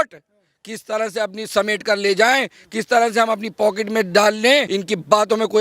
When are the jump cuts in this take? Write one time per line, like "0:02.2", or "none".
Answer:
0:04.7